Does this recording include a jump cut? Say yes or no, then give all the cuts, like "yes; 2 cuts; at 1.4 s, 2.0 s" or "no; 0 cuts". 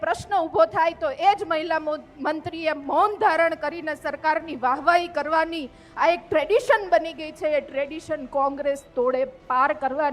no; 0 cuts